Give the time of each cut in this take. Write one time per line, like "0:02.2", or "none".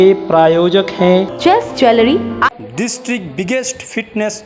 0:02.5